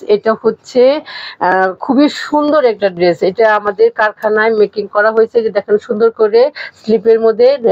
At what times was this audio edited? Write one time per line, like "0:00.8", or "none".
none